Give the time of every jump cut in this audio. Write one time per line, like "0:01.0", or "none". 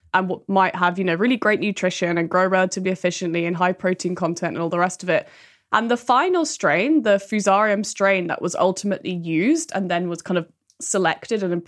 none